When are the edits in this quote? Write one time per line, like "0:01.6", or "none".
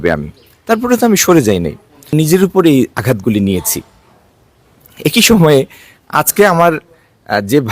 0:02.1